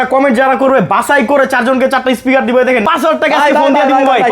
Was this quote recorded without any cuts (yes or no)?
no